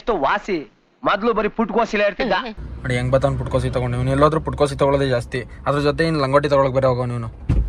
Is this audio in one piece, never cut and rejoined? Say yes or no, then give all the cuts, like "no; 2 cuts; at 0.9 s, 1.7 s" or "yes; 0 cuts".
yes; 0 cuts